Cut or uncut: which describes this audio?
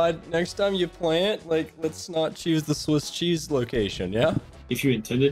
uncut